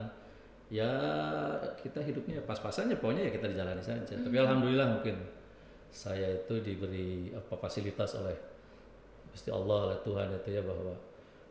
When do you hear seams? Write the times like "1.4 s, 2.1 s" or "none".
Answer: none